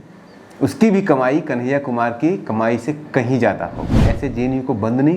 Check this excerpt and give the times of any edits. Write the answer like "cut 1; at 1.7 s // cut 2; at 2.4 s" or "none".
cut 1; at 4.1 s